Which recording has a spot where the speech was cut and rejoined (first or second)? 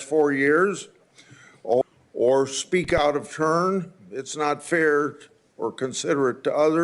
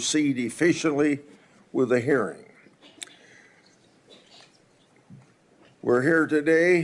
first